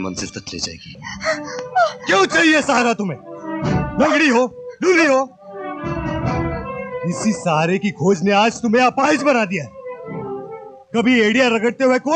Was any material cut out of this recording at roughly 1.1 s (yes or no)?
yes